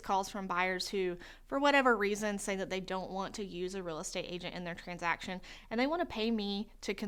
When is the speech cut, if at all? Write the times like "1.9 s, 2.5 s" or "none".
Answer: none